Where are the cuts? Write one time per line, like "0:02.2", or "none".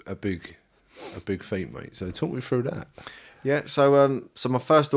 none